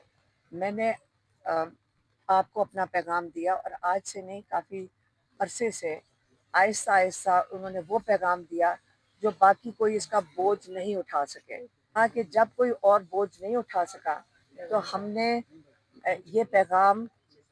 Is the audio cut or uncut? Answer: cut